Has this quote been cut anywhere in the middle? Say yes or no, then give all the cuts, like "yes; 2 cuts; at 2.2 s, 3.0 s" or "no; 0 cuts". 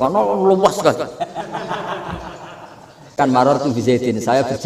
yes; 1 cut; at 3.2 s